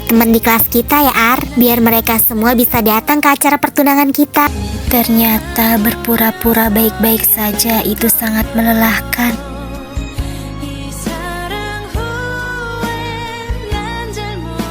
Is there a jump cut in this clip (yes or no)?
yes